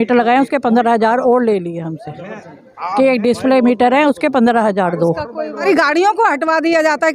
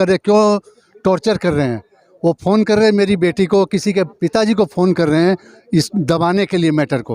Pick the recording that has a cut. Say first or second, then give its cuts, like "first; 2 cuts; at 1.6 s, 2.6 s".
first; 1 cut; at 5.6 s